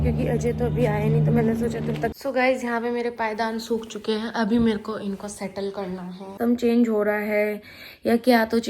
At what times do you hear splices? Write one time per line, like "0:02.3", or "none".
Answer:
0:02.2
0:06.4